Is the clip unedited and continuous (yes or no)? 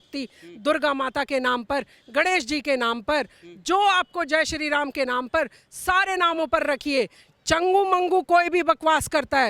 yes